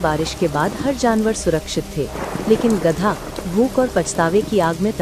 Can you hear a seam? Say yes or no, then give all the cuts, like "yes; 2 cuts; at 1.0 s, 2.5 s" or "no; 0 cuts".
no; 0 cuts